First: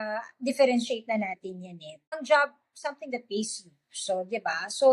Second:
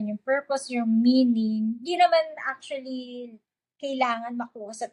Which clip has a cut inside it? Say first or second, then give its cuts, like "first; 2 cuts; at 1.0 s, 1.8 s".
first; 1 cut; at 2.1 s